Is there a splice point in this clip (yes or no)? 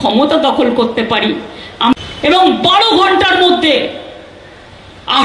yes